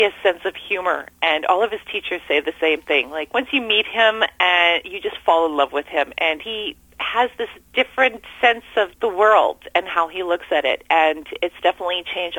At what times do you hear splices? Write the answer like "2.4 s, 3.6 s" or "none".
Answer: 3.2 s, 6.5 s, 7.6 s, 8.9 s